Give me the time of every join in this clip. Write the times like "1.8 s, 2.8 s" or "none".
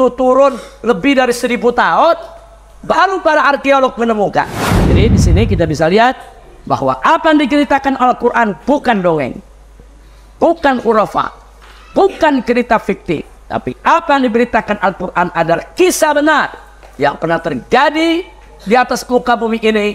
5.0 s